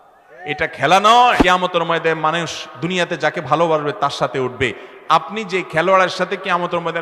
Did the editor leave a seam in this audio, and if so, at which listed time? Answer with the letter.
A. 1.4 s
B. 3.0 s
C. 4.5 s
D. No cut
A